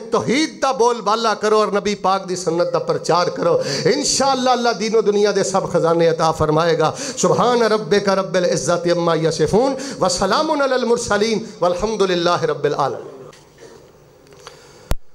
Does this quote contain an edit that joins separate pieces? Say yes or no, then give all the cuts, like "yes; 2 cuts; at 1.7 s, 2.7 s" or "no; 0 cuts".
no; 0 cuts